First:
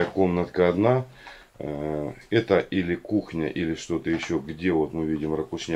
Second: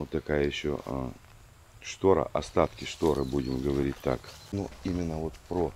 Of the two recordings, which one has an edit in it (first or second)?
second